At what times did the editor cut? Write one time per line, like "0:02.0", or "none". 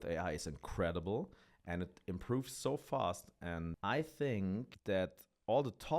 0:03.7
0:04.7